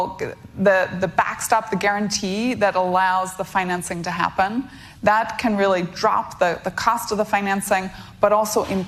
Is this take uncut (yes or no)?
yes